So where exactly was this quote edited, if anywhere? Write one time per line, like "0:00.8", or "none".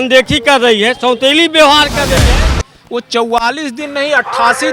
0:02.2